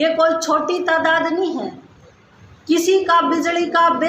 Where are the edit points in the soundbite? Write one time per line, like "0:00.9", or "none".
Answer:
none